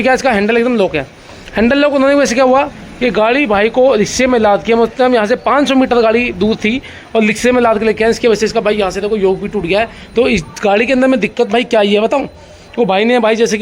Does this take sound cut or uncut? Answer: uncut